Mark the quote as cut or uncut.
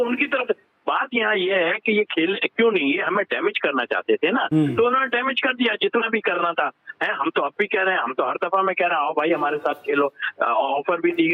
uncut